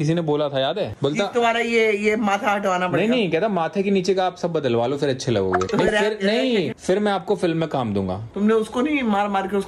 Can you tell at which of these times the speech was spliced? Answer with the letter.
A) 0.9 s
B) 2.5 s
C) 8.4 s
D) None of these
A